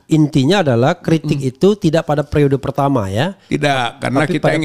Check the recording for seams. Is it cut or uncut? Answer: uncut